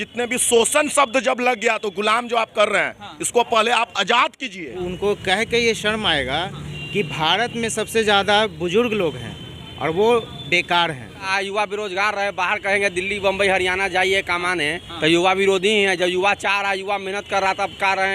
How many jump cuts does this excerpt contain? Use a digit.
2